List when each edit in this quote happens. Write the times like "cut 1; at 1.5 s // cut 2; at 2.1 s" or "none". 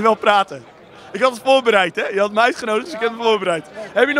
none